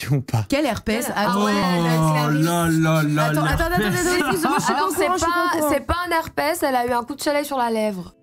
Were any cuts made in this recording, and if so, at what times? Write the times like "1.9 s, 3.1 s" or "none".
none